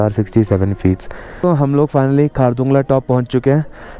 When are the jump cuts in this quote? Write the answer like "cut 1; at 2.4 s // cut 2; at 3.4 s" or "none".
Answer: cut 1; at 1.4 s